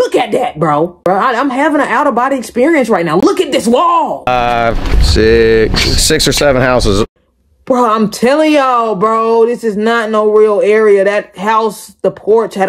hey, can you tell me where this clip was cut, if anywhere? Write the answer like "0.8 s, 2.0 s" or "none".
1.0 s, 4.3 s